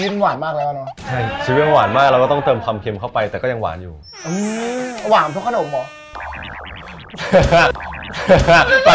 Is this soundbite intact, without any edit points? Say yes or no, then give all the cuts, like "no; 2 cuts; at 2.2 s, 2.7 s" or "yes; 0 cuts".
yes; 0 cuts